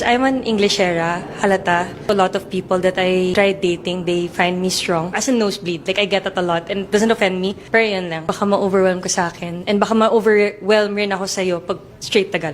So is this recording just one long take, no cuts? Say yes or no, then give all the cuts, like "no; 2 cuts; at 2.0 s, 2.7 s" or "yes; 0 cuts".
no; 2 cuts; at 7.0 s, 9.0 s